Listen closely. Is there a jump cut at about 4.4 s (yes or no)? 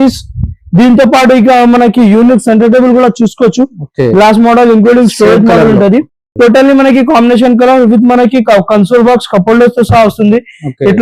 no